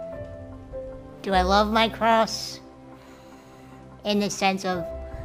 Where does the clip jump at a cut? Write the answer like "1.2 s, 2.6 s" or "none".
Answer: none